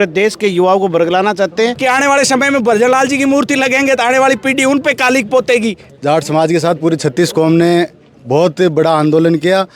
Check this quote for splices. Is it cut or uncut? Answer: cut